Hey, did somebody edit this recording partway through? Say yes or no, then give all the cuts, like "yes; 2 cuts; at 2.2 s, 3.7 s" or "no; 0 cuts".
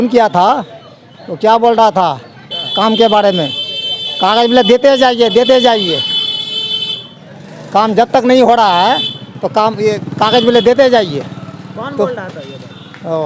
no; 0 cuts